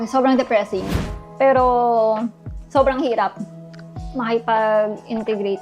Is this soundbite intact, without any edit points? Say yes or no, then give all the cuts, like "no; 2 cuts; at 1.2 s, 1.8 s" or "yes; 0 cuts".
no; 1 cut; at 0.9 s